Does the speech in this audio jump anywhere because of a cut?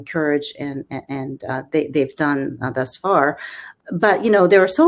yes; 1 cut; at 3.6 s

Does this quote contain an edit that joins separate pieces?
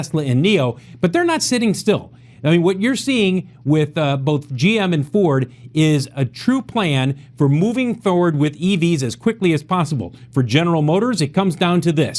yes; 1 cut; at 2.1 s

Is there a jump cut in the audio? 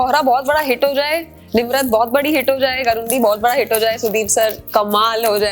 no; 0 cuts

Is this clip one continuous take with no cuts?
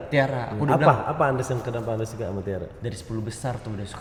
yes; 0 cuts

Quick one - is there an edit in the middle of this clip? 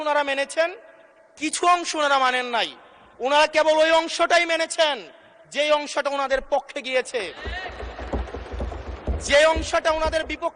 no; 0 cuts

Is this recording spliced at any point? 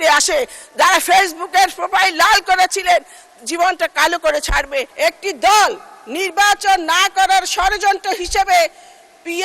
yes; 1 cut; at 4.9 s

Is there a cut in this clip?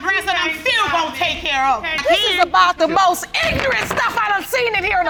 no; 0 cuts

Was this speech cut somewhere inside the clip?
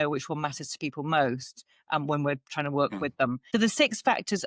yes; 1 cut; at 3.4 s

